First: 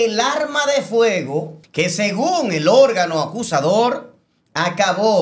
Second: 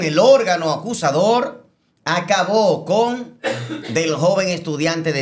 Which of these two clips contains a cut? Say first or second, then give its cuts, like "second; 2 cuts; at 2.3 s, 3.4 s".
first; 1 cut; at 1.6 s